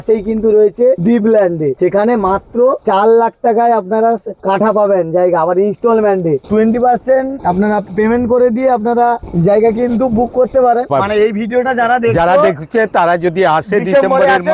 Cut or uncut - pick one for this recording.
cut